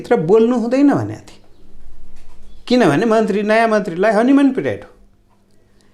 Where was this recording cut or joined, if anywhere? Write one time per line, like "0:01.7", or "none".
none

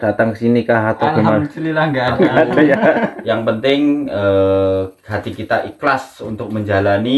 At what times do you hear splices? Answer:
0:03.2

